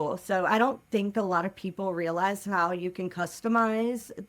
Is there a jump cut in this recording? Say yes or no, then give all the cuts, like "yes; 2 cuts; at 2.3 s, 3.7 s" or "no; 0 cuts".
no; 0 cuts